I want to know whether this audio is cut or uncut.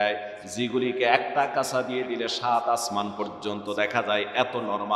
uncut